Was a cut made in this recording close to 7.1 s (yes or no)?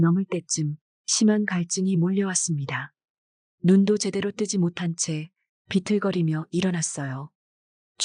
no